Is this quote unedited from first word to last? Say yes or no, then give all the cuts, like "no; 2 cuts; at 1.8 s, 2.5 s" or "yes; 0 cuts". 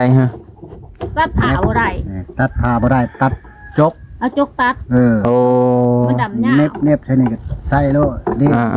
yes; 0 cuts